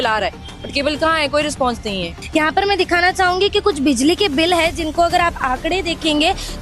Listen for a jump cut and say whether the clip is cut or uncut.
cut